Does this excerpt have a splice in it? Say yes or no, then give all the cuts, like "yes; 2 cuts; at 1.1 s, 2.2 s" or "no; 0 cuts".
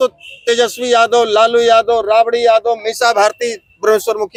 no; 0 cuts